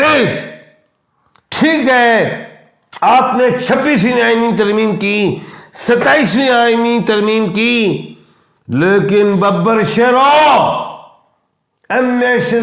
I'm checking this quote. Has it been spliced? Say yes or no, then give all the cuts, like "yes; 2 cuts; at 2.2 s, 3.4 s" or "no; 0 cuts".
no; 0 cuts